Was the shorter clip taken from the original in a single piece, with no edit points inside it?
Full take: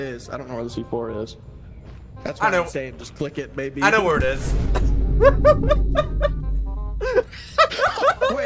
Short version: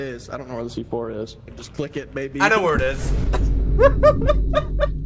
no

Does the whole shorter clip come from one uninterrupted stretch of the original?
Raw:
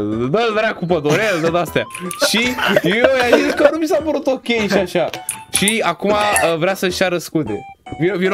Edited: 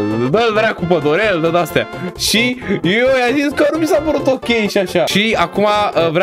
no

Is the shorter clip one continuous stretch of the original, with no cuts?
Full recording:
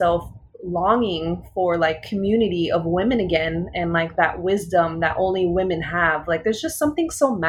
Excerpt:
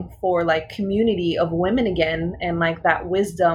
yes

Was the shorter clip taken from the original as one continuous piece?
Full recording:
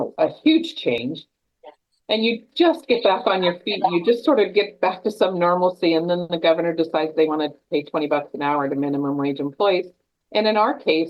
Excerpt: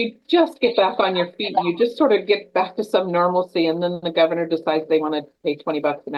yes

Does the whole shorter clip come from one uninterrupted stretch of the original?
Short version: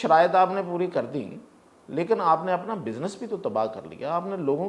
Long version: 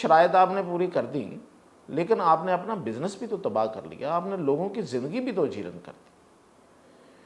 yes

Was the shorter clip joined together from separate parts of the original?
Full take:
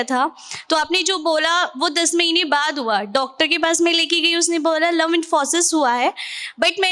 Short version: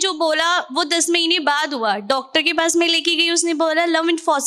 no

